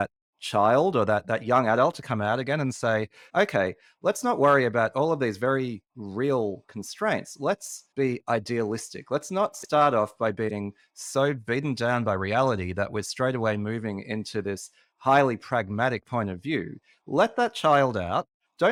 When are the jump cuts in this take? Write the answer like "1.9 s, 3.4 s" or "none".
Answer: none